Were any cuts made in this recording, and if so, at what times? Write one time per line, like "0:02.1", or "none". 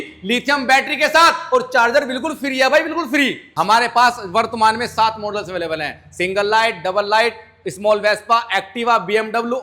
0:03.4